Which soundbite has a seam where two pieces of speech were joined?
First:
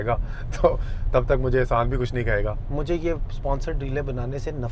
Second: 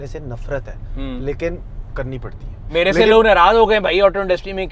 first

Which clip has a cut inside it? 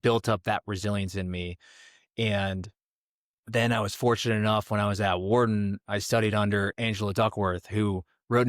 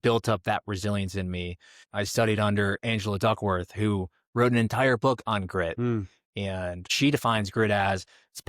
second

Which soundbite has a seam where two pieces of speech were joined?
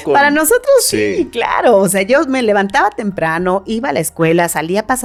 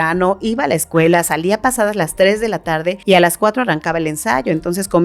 second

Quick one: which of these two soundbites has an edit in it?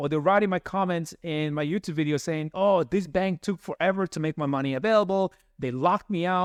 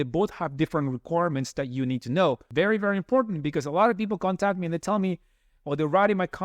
second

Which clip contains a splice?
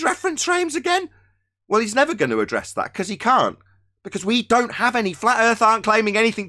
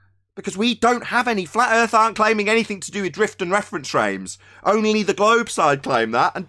first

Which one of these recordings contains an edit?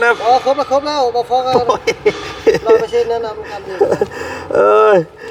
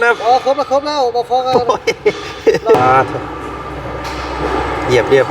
second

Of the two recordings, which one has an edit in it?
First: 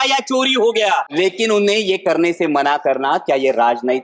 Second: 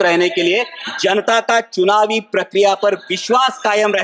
first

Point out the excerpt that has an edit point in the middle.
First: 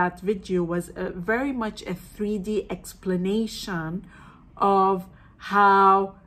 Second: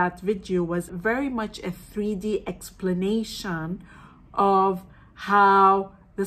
second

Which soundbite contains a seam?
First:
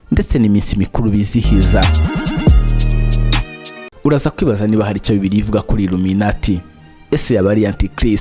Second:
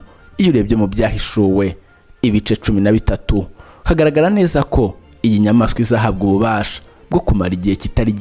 first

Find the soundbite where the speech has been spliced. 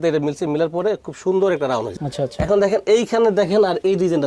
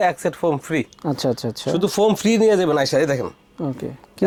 first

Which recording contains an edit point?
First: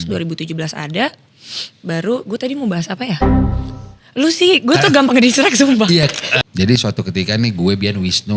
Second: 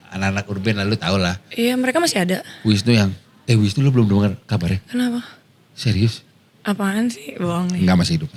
first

